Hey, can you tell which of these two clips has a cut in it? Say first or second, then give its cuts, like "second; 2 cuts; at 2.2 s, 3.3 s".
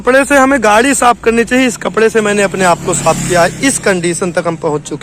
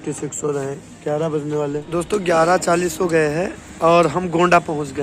second; 1 cut; at 1.9 s